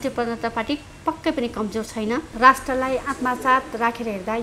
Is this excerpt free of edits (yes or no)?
no